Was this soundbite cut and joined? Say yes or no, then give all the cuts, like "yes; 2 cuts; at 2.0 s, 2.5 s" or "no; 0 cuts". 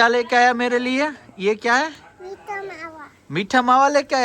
no; 0 cuts